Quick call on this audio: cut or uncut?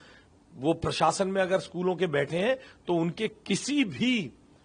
uncut